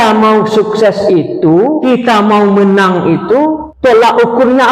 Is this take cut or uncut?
cut